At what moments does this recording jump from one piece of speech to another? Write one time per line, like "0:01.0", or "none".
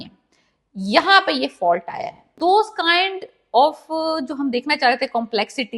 0:02.4